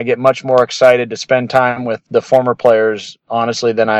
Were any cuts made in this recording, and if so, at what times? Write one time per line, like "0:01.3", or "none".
none